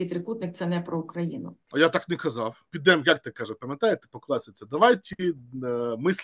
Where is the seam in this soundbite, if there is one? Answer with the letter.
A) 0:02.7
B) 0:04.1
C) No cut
A